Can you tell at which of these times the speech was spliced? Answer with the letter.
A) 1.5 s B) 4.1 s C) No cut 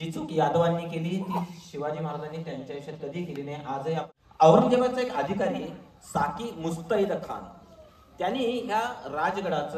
B